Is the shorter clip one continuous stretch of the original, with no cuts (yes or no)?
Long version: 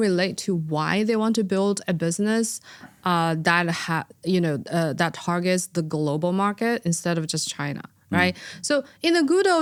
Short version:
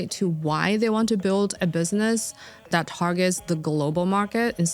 no